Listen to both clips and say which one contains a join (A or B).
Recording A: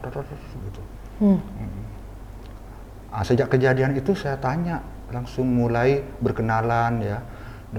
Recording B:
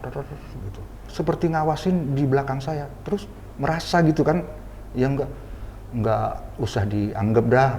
B